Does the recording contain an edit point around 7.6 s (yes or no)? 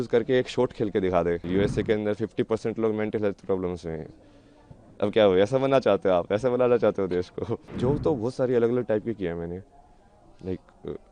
yes